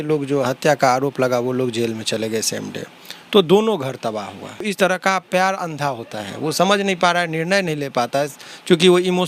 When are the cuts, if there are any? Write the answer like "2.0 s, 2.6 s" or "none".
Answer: 4.7 s